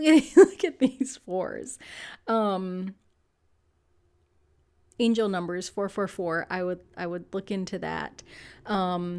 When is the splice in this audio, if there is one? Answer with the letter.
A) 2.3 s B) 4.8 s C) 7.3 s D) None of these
D